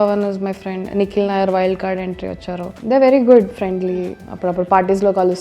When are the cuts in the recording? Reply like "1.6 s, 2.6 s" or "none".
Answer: 2.7 s